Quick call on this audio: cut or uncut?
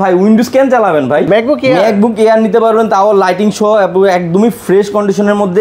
uncut